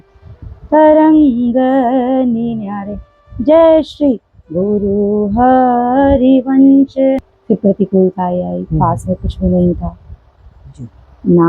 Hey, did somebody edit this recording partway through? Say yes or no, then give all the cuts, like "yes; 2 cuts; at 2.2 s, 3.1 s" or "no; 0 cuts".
yes; 1 cut; at 7.2 s